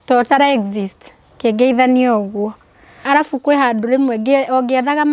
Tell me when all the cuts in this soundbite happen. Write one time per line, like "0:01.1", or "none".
0:03.0